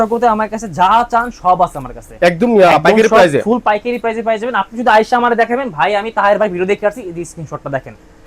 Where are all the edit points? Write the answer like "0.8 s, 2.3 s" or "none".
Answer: none